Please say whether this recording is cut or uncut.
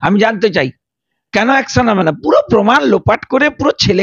uncut